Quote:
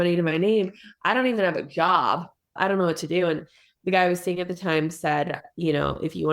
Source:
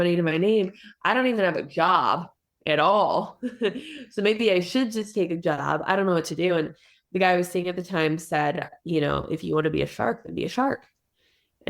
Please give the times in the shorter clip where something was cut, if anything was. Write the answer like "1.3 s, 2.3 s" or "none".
2.5 s